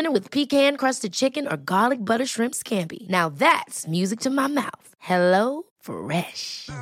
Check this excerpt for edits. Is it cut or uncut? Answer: uncut